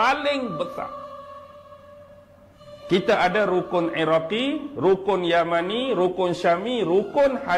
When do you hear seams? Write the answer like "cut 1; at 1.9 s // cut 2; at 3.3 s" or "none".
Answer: none